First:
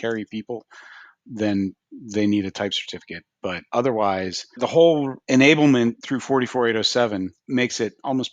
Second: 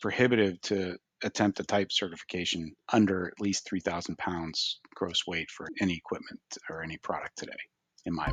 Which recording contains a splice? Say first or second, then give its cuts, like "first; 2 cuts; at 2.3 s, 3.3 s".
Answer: first; 5 cuts; at 3.6 s, 4.6 s, 5.2 s, 6.1 s, 7.4 s